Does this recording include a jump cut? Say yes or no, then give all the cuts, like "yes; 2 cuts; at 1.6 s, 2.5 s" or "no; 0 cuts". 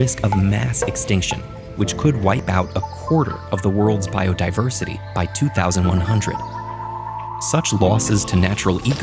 no; 0 cuts